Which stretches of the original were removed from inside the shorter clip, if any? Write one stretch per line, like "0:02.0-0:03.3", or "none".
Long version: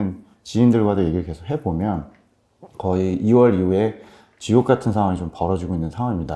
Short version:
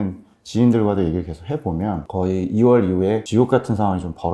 0:02.0-0:02.8
0:03.9-0:04.4